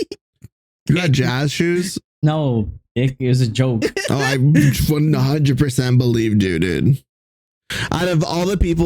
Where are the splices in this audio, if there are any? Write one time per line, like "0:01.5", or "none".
none